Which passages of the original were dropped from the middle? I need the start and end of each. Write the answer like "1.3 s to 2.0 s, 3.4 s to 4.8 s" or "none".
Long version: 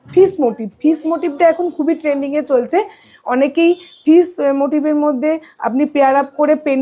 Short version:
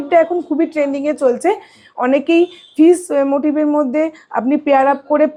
none